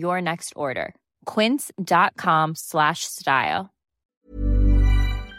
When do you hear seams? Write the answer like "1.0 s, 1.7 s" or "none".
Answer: 4.2 s

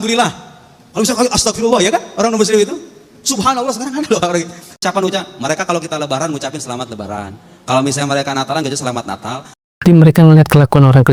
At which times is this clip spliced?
9.8 s

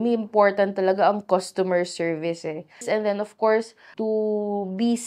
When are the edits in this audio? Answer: 2.9 s, 3.8 s

